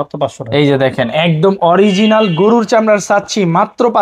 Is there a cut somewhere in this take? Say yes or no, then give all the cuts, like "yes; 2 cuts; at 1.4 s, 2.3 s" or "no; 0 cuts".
no; 0 cuts